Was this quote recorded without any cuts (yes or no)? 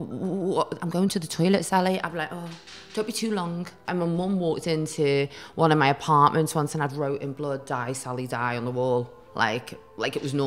no